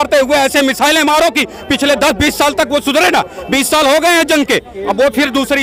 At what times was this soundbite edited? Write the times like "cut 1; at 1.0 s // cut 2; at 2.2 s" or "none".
none